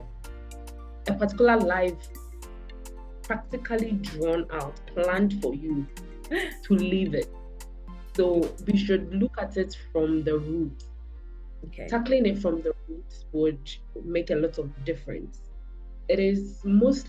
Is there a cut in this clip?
no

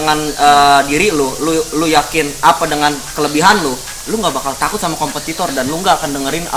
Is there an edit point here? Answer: no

